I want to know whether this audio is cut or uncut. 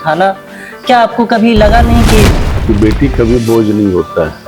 cut